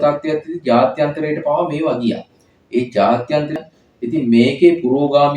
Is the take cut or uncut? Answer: cut